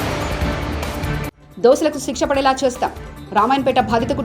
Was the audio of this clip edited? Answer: yes; 1 cut; at 1.3 s

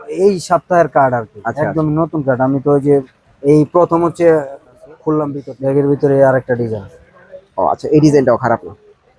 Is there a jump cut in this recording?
yes; 1 cut; at 5.4 s

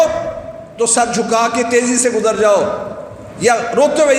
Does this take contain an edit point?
no; 0 cuts

